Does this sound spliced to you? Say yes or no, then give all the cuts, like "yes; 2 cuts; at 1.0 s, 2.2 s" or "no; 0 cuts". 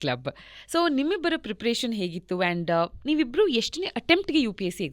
no; 0 cuts